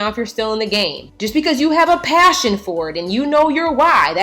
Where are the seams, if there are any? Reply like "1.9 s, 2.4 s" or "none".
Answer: 1.1 s